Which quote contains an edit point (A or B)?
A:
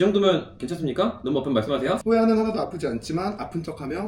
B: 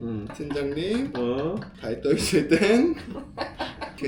A